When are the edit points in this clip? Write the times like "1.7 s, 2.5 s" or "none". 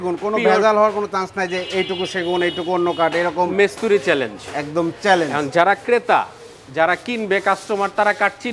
none

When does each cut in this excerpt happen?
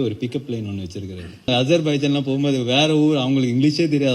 1.5 s

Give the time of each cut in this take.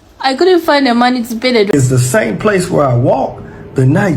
1.7 s

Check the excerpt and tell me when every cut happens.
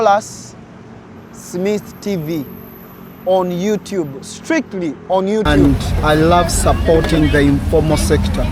5.5 s

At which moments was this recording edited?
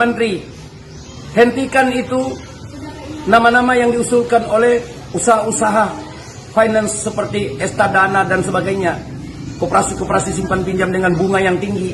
none

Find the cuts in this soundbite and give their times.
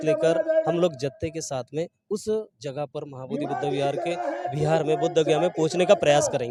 none

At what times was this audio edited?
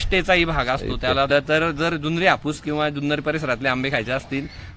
1.3 s

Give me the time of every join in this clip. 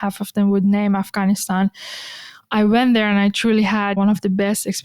none

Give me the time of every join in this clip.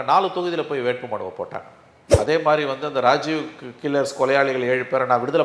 2.1 s

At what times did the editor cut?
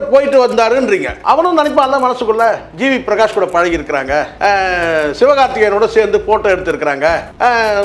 1.1 s, 2.7 s

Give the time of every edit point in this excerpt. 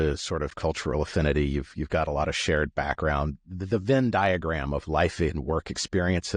none

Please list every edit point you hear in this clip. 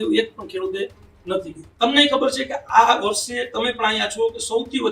1.6 s

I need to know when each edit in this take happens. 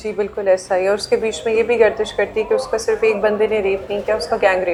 none

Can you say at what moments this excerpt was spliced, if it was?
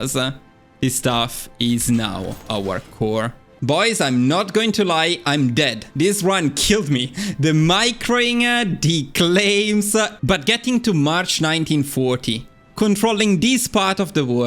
3.4 s

